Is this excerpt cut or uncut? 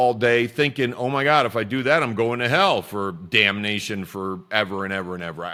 uncut